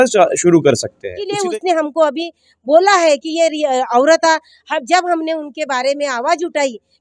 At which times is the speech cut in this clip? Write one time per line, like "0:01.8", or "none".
0:01.2